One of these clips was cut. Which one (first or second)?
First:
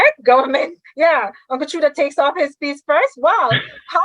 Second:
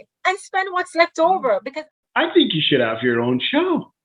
second